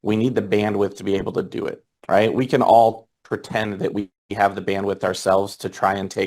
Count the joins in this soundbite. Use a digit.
1